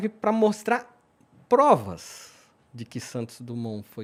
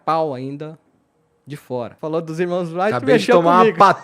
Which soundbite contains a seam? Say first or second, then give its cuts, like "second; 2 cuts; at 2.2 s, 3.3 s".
second; 1 cut; at 1.9 s